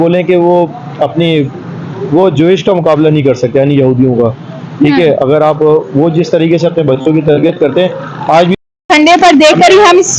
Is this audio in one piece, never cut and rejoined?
no; 1 cut; at 8.7 s

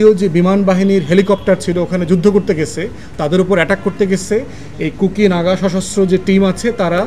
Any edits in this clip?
no; 0 cuts

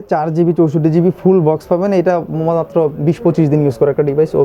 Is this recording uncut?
yes; 0 cuts

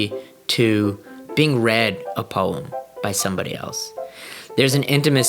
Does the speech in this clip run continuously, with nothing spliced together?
no; 1 cut; at 1.2 s

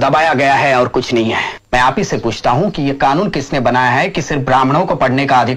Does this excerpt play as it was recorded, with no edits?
no; 1 cut; at 1.6 s

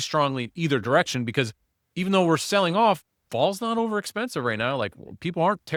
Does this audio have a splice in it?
no; 0 cuts

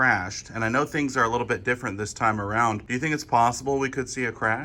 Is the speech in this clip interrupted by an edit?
yes; 1 cut; at 2.8 s

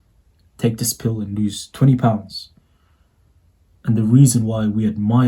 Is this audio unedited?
yes; 0 cuts

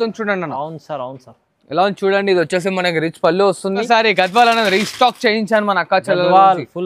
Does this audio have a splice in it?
yes; 1 cut; at 3.9 s

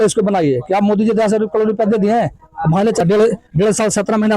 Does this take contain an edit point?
yes; 1 cut; at 3.0 s

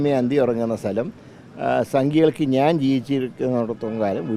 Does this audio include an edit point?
no; 0 cuts

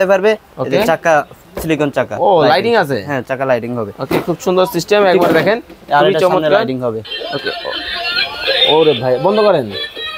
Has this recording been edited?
no; 0 cuts

